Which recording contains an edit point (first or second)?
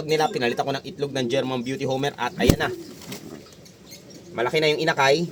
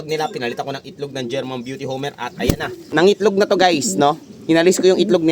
second